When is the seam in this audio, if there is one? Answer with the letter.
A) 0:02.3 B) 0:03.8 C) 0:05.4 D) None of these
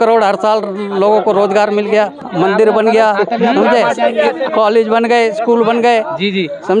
A